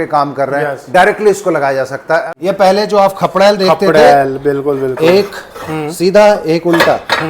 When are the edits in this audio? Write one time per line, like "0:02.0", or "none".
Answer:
0:02.2